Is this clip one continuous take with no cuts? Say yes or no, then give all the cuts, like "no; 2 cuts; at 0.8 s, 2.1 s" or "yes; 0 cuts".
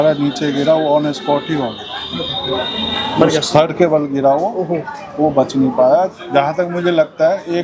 yes; 0 cuts